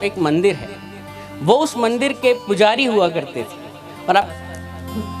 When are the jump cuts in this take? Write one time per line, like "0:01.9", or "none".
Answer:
0:04.3